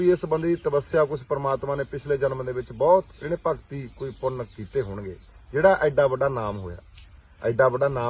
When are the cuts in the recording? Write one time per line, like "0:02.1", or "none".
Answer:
none